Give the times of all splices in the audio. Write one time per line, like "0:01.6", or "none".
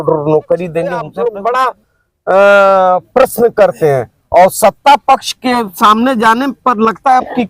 0:01.0